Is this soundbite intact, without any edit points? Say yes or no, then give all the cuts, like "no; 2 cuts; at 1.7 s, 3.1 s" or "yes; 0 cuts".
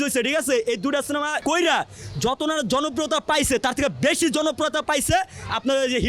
no; 1 cut; at 1.4 s